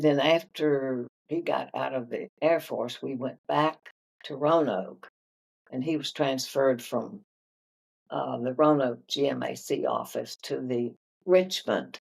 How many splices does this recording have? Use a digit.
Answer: 2